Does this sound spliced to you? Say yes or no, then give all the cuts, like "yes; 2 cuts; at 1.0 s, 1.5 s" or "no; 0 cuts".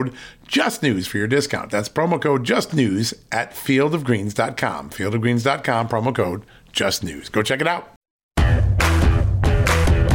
yes; 1 cut; at 8.4 s